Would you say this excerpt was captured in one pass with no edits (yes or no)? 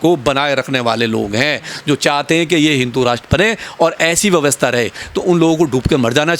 yes